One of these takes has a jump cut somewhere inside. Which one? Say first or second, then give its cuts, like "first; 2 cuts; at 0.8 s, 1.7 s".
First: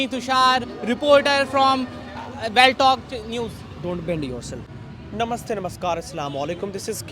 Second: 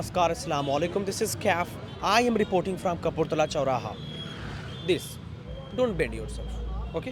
first; 1 cut; at 4.7 s